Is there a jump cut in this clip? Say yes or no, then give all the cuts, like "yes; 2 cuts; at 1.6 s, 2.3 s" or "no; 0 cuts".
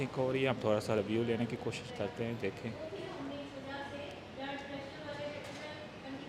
no; 0 cuts